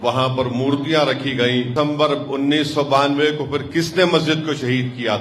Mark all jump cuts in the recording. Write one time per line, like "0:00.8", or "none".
0:01.7